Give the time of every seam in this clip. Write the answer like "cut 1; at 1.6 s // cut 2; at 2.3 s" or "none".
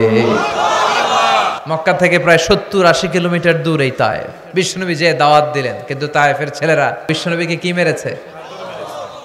cut 1; at 1.5 s // cut 2; at 4.3 s // cut 3; at 7.1 s